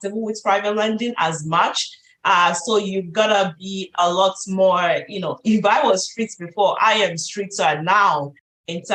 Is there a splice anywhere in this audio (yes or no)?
no